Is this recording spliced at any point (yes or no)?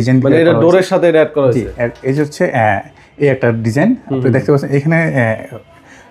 no